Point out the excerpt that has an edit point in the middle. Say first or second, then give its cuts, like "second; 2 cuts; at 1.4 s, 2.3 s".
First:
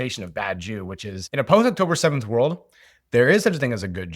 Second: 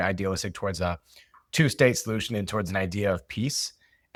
first; 1 cut; at 1.3 s